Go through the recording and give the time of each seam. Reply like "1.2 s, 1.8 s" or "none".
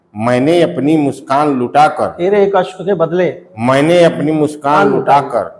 none